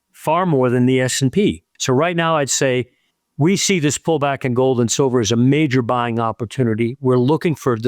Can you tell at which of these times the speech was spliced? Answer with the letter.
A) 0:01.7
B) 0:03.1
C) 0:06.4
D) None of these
A